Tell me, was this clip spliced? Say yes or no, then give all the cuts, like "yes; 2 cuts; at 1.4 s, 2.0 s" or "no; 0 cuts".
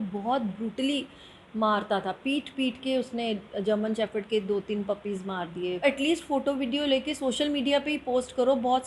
yes; 1 cut; at 5.8 s